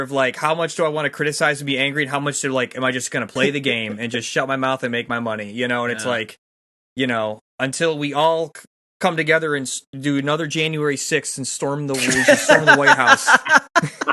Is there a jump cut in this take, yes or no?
no